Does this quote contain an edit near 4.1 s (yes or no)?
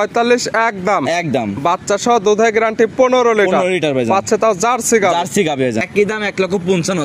no